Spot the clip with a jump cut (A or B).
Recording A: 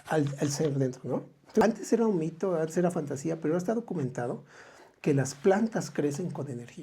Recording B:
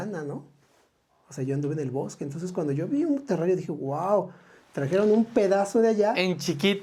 A